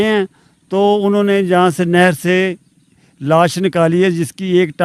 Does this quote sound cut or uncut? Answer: uncut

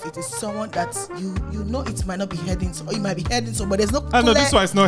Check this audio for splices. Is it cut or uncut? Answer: uncut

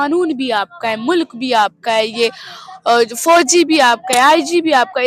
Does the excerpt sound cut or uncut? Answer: uncut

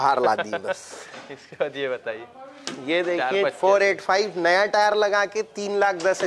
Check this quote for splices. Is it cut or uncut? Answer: uncut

